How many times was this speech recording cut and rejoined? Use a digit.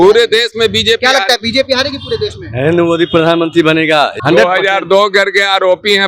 1